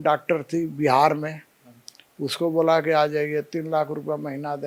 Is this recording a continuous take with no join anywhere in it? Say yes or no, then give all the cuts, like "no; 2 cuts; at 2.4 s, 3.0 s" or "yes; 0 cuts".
yes; 0 cuts